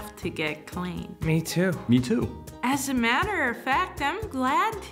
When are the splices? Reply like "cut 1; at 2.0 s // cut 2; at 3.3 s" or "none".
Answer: cut 1; at 1.8 s // cut 2; at 2.4 s